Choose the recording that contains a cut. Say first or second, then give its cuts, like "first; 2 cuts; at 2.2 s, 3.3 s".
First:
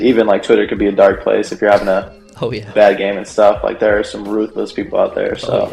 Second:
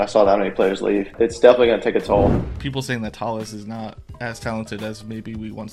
second; 2 cuts; at 1.1 s, 2.4 s